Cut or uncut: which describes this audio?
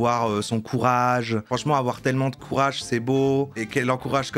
cut